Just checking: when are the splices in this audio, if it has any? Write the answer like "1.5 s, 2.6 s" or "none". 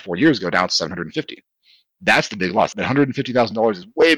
2.7 s